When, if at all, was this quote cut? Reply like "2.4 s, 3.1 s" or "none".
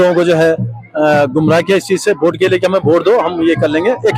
none